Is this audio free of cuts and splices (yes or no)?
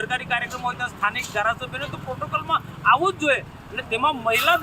yes